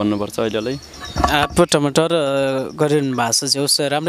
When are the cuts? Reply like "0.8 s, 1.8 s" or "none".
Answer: none